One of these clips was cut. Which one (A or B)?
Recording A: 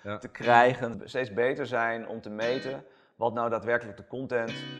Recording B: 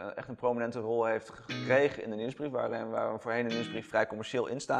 A